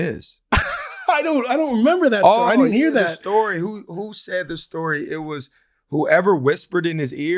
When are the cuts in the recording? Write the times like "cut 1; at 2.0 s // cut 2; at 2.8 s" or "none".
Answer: none